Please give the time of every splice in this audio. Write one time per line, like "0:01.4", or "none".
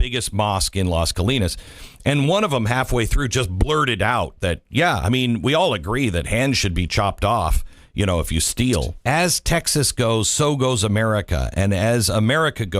0:08.9